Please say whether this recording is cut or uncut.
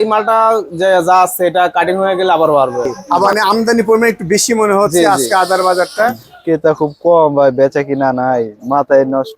cut